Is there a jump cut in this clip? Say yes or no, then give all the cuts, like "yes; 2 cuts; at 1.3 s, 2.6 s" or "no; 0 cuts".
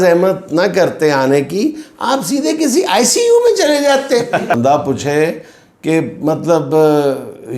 yes; 1 cut; at 4.5 s